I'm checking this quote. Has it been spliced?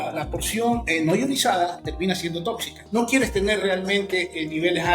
yes; 1 cut; at 2.8 s

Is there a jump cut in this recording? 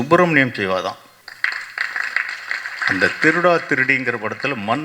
yes; 1 cut; at 1.1 s

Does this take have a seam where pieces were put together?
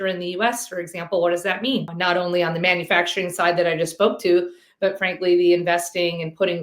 yes; 1 cut; at 1.9 s

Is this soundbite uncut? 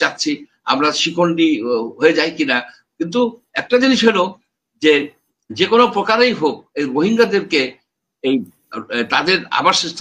yes; 0 cuts

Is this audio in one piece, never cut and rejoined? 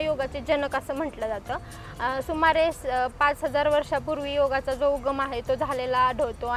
yes; 0 cuts

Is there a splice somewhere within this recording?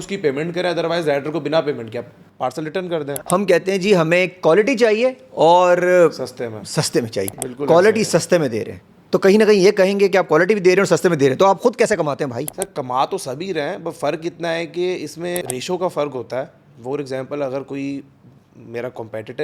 yes; 3 cuts; at 3.0 s, 7.3 s, 15.4 s

